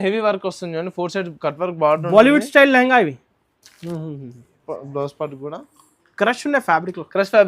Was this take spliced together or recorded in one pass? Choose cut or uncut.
cut